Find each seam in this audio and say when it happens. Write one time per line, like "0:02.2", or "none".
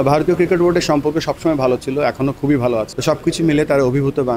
0:02.9